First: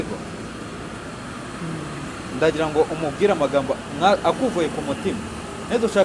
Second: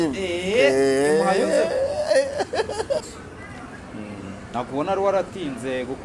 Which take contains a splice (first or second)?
second